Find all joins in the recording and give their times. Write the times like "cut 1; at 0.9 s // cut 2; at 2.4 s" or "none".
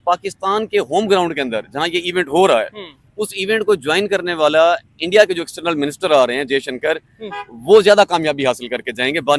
none